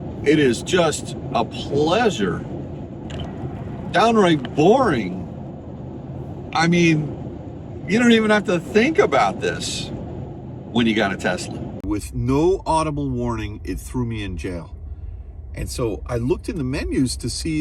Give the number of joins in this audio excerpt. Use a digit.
1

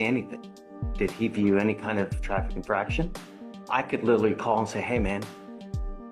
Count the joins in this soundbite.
1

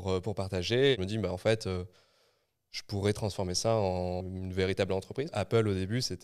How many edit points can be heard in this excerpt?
3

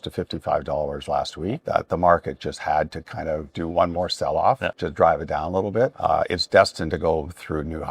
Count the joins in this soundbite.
3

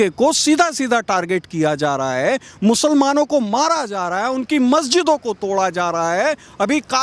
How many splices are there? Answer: 0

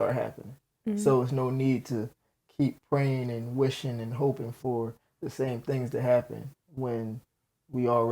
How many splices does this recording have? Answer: 0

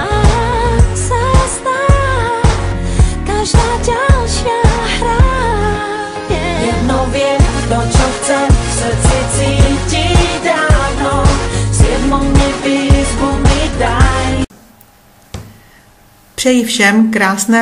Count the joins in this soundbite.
1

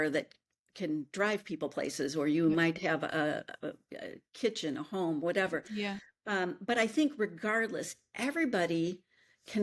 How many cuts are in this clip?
0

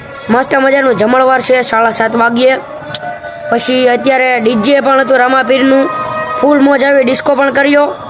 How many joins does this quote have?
0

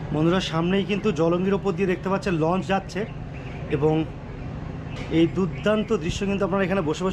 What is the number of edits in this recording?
0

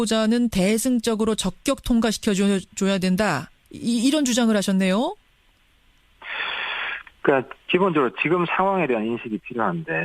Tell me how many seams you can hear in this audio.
1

